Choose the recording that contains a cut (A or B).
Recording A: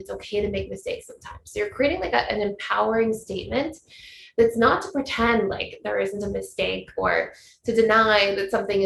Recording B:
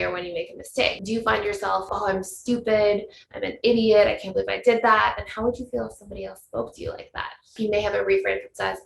B